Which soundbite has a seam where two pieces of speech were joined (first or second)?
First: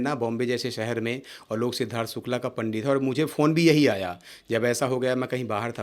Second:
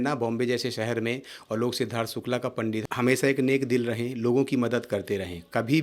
second